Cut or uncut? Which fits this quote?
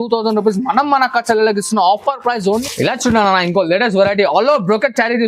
cut